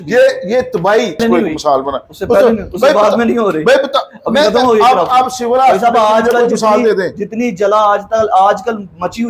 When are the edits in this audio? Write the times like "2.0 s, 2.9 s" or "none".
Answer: 1.2 s